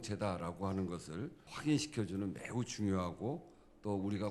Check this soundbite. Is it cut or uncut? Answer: cut